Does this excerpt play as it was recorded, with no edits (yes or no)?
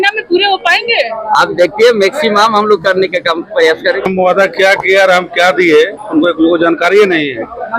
no